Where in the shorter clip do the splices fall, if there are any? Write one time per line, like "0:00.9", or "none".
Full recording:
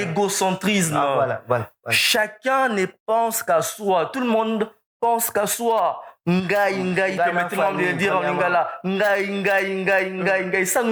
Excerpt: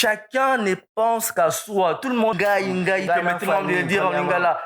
0:02.3